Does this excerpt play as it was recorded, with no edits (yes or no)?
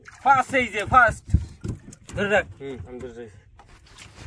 yes